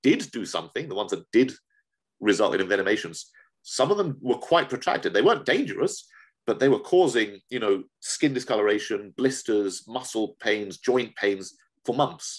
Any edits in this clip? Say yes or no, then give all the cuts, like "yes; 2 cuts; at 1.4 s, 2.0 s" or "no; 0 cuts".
no; 0 cuts